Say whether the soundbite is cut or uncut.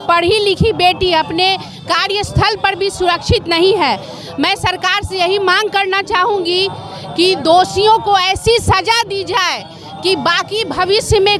uncut